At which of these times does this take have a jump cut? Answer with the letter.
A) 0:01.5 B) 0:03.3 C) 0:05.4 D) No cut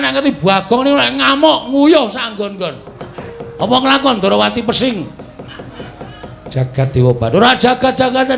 B